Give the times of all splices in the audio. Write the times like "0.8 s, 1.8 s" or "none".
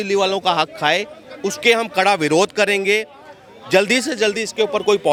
none